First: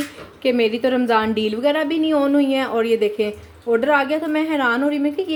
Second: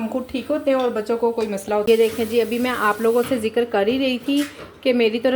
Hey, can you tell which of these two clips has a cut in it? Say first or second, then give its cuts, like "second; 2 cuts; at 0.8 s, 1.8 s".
second; 1 cut; at 1.8 s